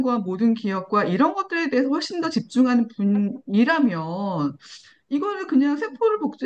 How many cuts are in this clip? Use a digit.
0